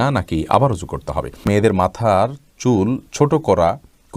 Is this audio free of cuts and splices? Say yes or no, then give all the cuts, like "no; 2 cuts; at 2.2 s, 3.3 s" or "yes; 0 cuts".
no; 1 cut; at 1.4 s